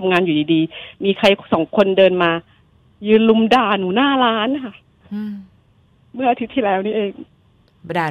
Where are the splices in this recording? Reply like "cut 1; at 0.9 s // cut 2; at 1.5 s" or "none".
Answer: none